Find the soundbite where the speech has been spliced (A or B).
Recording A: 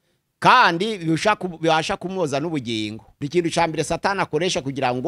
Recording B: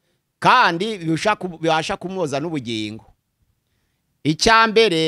A